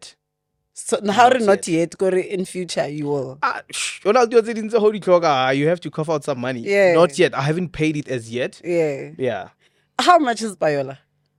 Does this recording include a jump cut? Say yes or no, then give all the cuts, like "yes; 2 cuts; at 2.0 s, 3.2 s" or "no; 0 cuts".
no; 0 cuts